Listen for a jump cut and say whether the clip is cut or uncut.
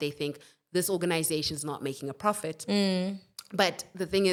uncut